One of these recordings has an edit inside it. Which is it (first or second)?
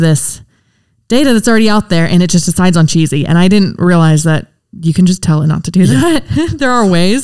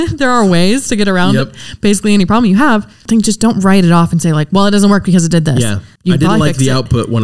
second